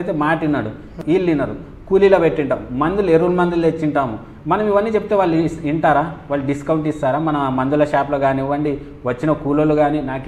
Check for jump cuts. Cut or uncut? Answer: cut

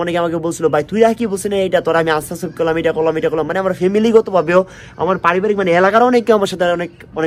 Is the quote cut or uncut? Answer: uncut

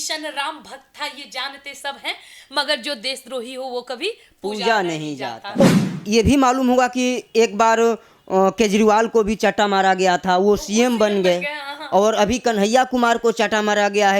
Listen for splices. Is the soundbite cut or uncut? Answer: cut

